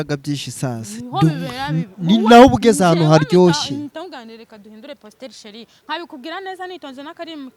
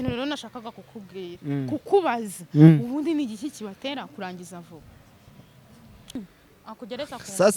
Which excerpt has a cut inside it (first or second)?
second